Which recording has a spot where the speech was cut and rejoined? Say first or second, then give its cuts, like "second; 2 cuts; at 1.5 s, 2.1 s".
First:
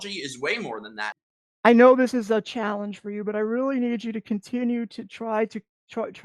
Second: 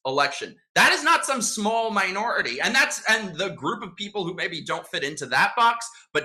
first; 1 cut; at 1.2 s